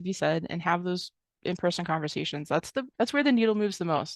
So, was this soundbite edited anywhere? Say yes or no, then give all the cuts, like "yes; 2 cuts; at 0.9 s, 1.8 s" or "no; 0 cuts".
yes; 1 cut; at 2.9 s